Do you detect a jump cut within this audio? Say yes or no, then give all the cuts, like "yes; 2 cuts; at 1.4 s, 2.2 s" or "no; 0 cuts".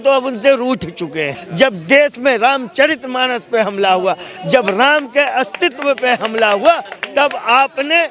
yes; 1 cut; at 1.4 s